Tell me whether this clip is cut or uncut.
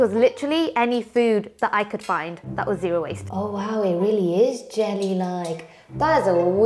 cut